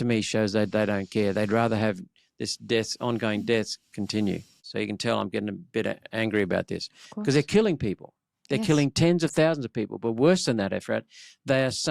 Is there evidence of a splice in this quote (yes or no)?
yes